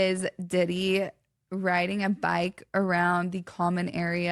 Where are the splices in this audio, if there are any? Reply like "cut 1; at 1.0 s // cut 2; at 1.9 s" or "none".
none